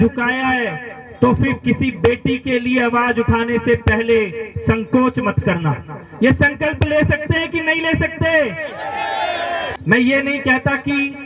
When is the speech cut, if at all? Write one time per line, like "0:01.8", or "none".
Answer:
0:09.7